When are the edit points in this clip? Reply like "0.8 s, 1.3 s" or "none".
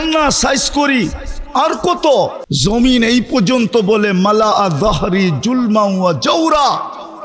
2.5 s